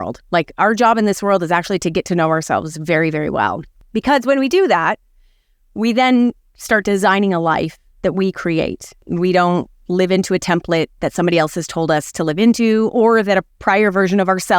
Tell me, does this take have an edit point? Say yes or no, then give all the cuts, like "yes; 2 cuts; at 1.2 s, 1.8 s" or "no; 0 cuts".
yes; 2 cuts; at 3.9 s, 9.1 s